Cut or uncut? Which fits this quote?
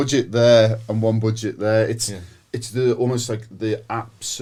uncut